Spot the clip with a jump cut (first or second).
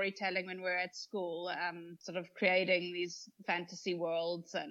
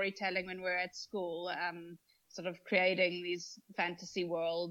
first